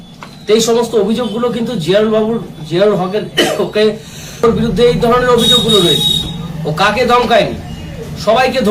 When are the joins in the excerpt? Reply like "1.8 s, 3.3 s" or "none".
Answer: 4.4 s